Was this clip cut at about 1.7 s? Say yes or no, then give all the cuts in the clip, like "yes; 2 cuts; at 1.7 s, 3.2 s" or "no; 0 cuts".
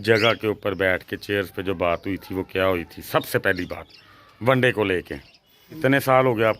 no; 1 cut; at 5.7 s